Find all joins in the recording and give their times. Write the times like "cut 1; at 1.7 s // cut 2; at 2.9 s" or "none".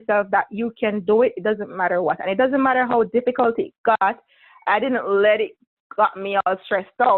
none